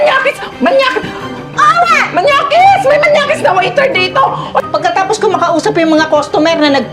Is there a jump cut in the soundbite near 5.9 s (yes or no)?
no